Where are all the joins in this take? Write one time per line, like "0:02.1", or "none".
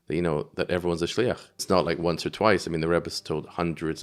0:01.6